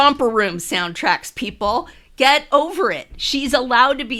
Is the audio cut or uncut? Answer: uncut